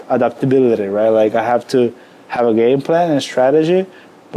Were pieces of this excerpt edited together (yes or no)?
no